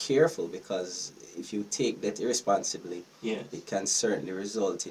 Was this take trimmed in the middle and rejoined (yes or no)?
no